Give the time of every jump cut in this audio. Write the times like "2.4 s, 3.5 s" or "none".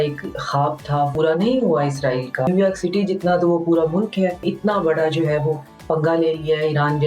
1.1 s, 2.5 s, 4.4 s